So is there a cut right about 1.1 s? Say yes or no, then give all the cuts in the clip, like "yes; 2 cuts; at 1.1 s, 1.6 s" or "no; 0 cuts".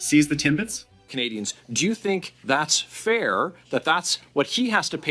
yes; 1 cut; at 1.1 s